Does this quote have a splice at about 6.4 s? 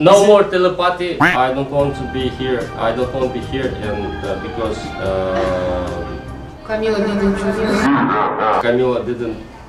no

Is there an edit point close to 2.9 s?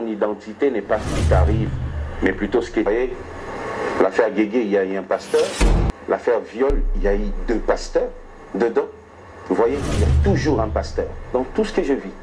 yes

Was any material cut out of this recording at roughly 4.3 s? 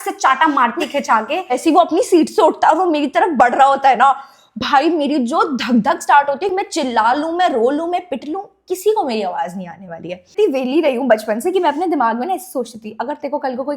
no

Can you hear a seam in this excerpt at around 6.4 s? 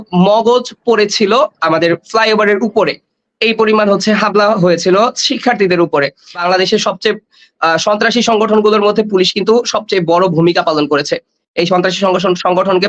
yes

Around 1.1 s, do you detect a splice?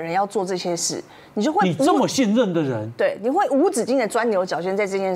no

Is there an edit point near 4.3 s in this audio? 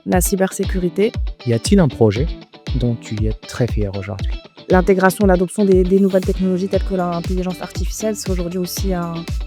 yes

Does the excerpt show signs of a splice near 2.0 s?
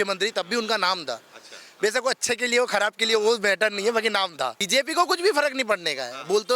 no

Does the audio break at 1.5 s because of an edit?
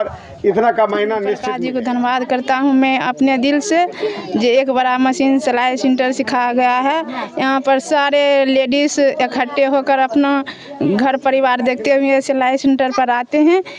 yes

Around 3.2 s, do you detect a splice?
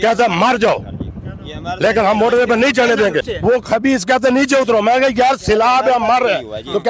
yes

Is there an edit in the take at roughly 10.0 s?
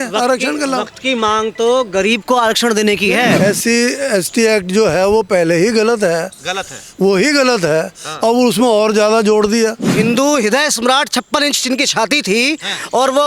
yes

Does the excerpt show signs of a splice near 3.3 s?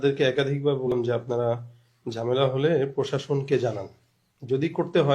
no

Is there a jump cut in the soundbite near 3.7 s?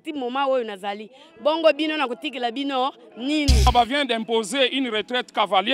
yes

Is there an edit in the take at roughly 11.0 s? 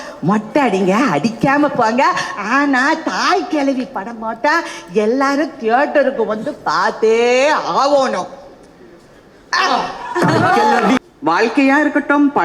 yes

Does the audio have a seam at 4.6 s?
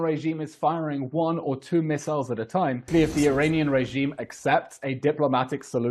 no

